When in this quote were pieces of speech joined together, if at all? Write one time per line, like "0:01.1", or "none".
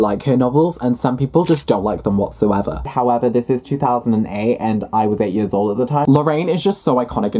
0:02.8
0:06.0